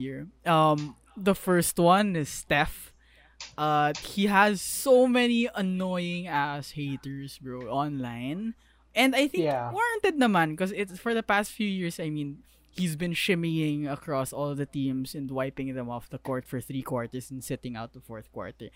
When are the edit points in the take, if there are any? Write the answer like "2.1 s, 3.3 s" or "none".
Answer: none

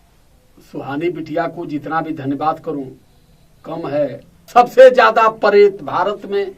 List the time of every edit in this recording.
4.3 s

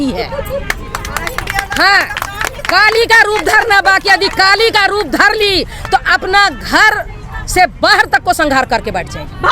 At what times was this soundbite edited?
none

